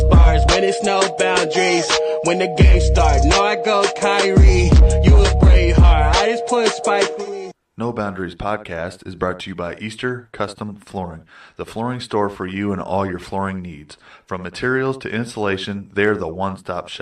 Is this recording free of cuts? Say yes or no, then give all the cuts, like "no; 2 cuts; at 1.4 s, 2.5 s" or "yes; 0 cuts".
no; 1 cut; at 7.1 s